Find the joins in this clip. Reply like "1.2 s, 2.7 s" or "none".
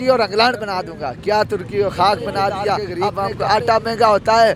3.1 s